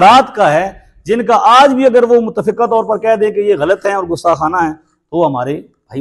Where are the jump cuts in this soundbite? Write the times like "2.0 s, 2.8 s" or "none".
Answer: none